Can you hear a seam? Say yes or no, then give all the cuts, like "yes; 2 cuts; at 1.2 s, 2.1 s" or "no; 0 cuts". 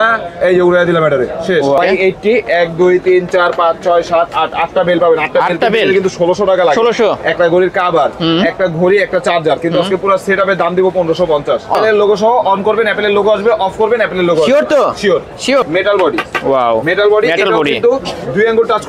yes; 3 cuts; at 1.8 s, 11.8 s, 15.6 s